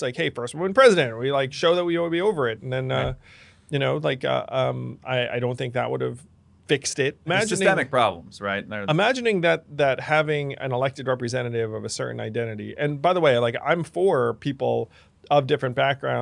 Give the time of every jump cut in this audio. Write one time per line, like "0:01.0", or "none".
0:07.3
0:08.7